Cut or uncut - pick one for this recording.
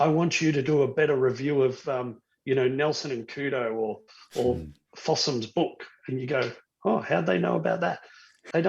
uncut